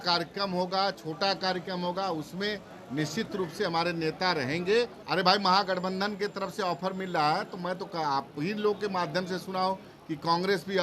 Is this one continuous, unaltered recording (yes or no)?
no